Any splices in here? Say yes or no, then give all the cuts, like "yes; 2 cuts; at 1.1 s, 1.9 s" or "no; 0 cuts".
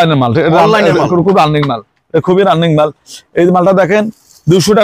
no; 0 cuts